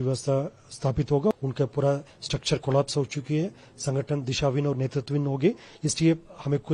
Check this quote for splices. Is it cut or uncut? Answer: cut